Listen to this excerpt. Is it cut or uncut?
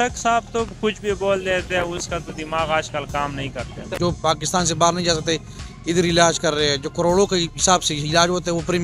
cut